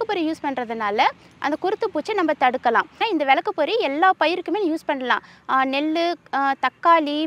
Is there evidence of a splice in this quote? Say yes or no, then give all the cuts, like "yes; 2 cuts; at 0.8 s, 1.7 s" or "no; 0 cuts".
yes; 1 cut; at 2.9 s